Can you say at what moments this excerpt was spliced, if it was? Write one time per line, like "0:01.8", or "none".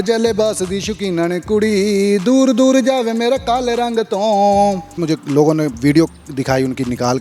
0:05.0